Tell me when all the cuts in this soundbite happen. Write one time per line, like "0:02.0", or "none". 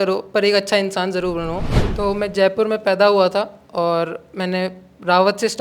0:01.7